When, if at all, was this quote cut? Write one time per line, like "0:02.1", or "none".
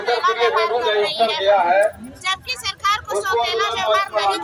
none